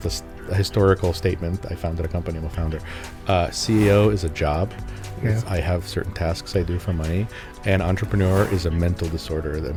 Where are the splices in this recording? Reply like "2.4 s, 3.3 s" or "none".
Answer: none